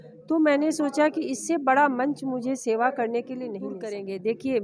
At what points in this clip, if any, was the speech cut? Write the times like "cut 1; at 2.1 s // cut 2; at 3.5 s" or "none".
cut 1; at 3.7 s